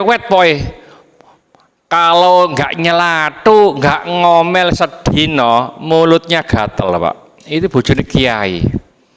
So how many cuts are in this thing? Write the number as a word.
zero